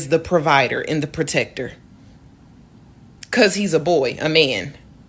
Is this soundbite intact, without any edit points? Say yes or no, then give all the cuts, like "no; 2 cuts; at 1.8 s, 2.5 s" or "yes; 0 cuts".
no; 2 cuts; at 1.9 s, 3.1 s